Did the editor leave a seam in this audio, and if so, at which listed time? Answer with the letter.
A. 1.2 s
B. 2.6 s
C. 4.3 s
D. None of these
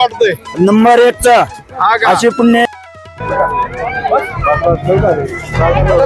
B